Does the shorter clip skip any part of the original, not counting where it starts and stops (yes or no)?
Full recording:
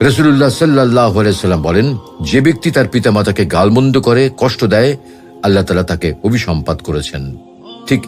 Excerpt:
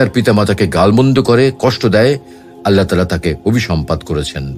no